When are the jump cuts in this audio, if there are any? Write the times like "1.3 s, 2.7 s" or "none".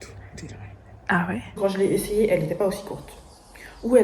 1.6 s